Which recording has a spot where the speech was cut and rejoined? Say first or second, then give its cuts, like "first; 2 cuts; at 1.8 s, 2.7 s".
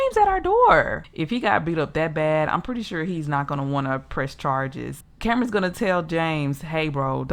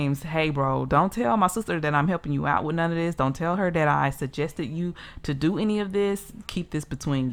first; 2 cuts; at 1.1 s, 5.0 s